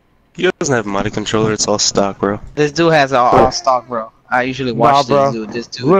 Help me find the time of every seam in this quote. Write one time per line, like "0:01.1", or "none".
0:02.5